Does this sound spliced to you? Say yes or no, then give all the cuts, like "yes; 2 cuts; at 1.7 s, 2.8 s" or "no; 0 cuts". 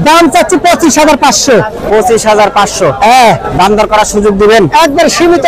no; 0 cuts